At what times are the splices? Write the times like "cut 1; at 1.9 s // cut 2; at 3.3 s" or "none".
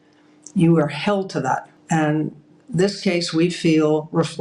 cut 1; at 1.7 s